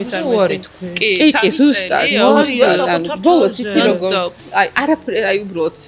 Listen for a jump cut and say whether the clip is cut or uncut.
uncut